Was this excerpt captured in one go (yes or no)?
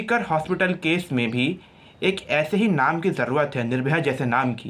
yes